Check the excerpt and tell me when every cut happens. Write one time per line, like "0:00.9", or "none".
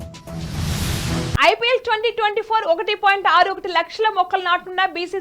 0:01.3